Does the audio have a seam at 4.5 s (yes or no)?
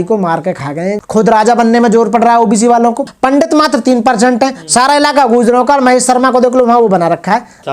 no